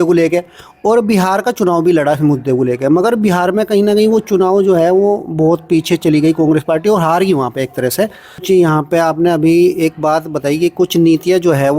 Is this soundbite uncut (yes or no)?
no